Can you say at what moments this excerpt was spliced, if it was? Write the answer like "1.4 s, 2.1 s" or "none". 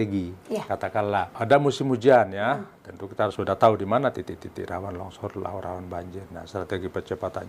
1.3 s, 3.4 s